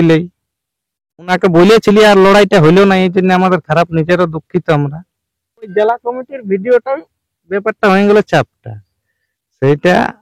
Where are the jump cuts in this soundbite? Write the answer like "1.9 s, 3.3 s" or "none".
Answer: 1.3 s, 5.7 s

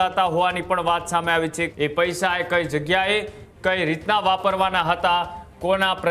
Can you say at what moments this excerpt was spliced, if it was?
1.7 s

